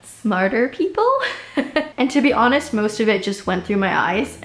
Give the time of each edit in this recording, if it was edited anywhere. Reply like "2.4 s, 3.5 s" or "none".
1.9 s